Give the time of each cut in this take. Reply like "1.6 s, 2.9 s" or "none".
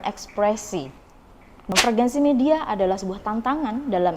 1.5 s

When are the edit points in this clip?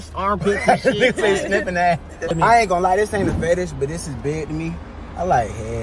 2.3 s

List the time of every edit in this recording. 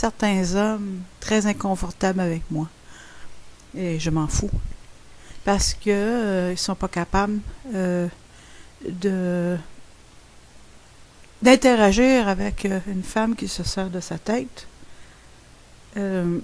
4.0 s

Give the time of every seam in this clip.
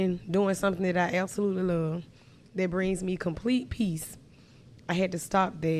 none

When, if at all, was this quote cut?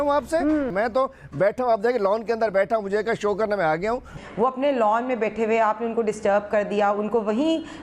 0.7 s, 4.2 s

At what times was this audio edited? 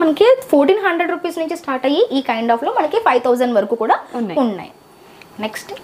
none

